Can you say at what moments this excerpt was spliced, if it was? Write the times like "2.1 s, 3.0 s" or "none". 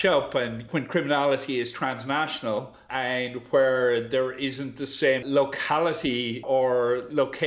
none